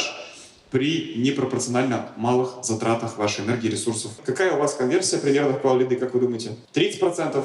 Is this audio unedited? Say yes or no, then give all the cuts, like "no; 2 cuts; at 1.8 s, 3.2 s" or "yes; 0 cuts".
no; 2 cuts; at 4.2 s, 6.5 s